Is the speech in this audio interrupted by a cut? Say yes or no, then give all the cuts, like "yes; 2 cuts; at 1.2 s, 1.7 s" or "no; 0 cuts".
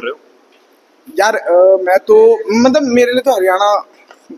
no; 0 cuts